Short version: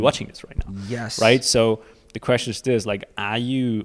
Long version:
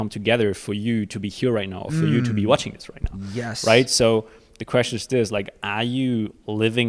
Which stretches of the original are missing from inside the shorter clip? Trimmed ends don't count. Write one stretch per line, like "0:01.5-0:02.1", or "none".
none